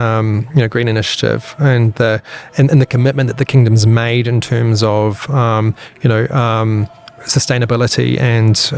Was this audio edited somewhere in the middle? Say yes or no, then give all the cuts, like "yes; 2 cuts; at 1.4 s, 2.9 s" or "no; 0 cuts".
no; 0 cuts